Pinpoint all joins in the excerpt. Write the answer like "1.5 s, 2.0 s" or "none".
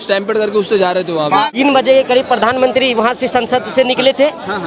1.5 s